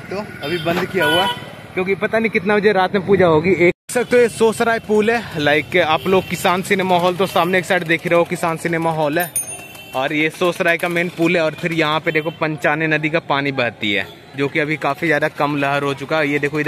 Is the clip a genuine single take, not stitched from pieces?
no; 1 cut; at 3.8 s

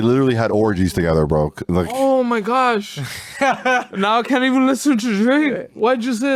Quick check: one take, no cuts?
yes; 0 cuts

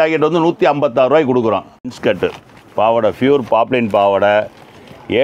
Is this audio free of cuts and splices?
no; 1 cut; at 1.7 s

